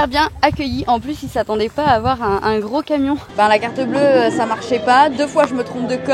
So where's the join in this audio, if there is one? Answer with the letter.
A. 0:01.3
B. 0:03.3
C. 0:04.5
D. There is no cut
B